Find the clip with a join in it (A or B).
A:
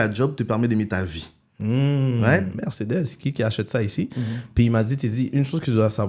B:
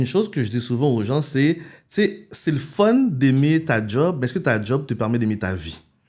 A